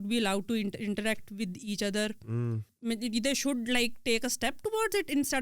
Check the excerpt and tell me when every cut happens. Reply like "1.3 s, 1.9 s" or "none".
2.7 s